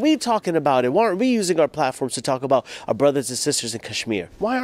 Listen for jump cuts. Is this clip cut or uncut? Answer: uncut